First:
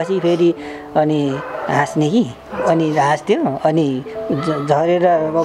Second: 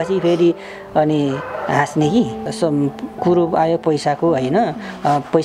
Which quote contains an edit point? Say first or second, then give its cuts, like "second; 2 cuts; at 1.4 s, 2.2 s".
second; 1 cut; at 2.5 s